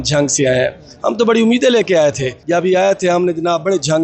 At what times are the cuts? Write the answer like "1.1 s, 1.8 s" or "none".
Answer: 2.3 s